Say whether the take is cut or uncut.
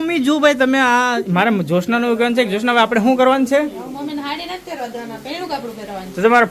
uncut